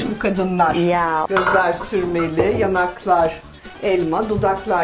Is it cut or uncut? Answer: cut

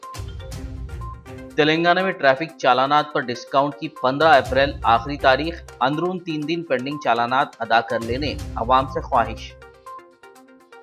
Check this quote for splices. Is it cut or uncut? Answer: cut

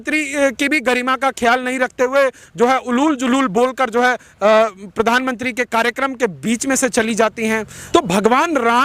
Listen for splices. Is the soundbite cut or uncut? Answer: cut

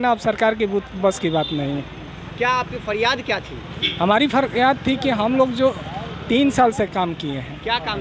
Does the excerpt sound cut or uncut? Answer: uncut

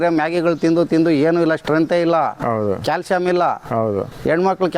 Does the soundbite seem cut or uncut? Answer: uncut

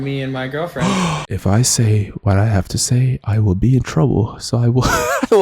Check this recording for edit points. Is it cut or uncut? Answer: cut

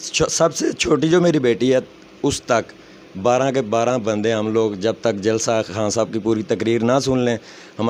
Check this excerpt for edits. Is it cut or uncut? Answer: uncut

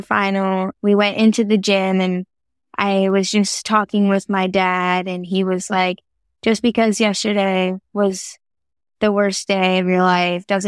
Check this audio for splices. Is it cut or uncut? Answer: uncut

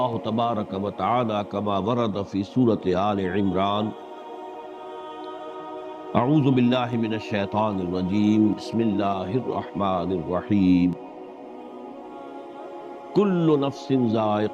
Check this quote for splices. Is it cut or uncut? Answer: cut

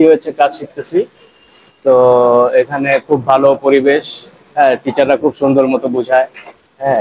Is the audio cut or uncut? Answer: uncut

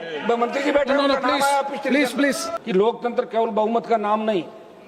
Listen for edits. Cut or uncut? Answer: cut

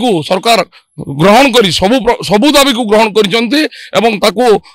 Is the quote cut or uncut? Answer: uncut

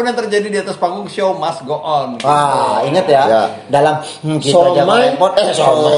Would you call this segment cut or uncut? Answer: uncut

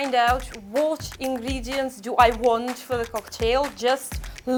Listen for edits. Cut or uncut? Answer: uncut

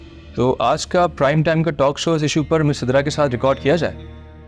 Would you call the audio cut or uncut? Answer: uncut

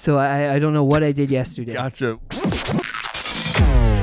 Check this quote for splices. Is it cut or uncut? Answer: cut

